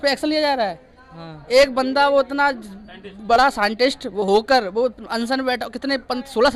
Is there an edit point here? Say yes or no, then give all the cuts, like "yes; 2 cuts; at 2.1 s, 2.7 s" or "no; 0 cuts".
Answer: no; 0 cuts